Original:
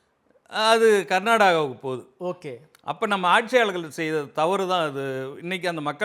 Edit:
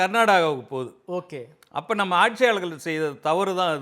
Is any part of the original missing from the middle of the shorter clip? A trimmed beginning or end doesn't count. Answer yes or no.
no